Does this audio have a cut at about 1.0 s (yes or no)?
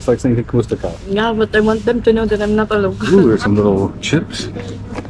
no